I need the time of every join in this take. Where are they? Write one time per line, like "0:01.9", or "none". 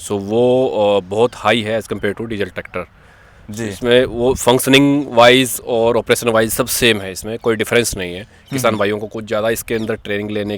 none